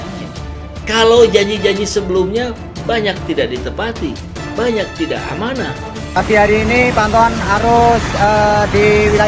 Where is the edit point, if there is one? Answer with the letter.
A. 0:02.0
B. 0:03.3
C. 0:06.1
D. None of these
C